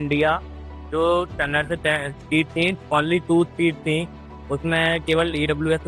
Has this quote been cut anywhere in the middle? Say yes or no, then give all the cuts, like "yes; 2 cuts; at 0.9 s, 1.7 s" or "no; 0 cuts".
no; 0 cuts